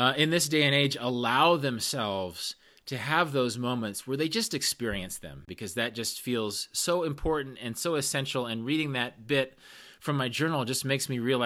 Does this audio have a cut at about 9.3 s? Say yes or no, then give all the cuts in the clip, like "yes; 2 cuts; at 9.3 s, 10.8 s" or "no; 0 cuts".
no; 1 cut; at 5.5 s